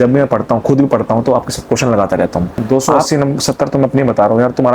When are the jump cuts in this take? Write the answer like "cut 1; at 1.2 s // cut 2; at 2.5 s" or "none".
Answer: cut 1; at 2.8 s